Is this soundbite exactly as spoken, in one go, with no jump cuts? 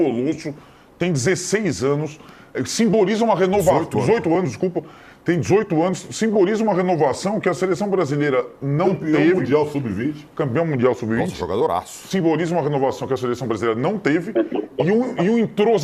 yes; 0 cuts

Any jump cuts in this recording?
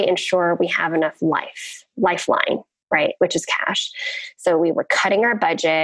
no; 0 cuts

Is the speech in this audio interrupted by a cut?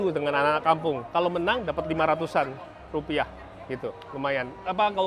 no; 0 cuts

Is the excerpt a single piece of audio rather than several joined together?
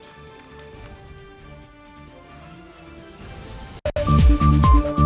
no; 1 cut; at 3.9 s

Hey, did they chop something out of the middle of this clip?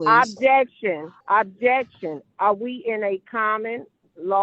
yes; 1 cut; at 1.1 s

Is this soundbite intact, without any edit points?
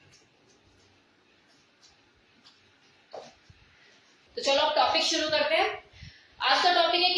no; 1 cut; at 4.2 s

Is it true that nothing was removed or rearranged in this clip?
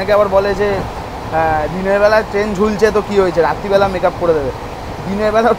yes; 0 cuts

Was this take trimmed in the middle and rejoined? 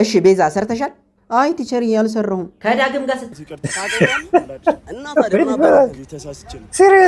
yes; 1 cut; at 3.4 s

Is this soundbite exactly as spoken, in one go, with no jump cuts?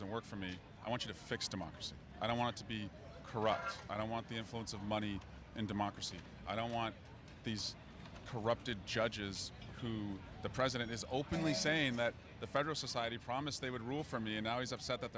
yes; 0 cuts

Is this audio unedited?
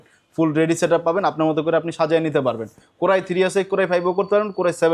yes; 0 cuts

